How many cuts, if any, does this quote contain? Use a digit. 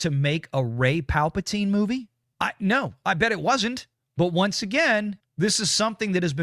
1